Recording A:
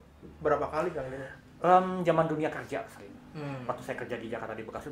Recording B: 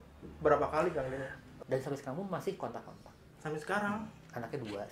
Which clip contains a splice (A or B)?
B